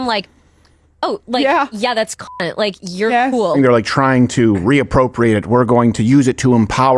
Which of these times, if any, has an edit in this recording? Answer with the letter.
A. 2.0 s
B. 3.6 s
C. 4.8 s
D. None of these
B